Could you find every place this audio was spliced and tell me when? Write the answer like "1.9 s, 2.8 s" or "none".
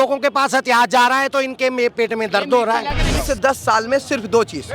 3.1 s